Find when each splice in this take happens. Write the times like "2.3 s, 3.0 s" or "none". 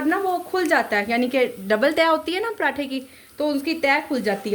none